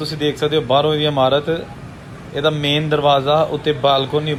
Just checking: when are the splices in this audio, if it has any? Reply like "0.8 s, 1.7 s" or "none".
none